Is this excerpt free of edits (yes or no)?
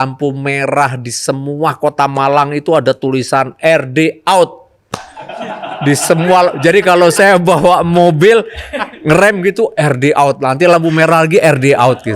yes